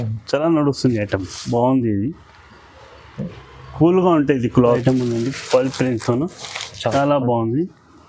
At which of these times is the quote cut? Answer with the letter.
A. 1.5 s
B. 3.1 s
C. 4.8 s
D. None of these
C